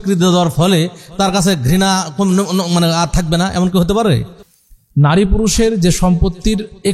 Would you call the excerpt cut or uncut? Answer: cut